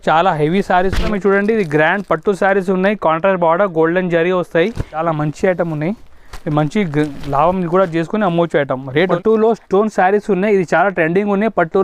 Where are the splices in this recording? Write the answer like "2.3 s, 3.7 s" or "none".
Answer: 1.1 s, 5.0 s, 8.9 s